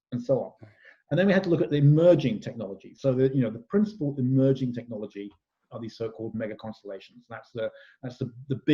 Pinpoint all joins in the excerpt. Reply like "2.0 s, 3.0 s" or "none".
none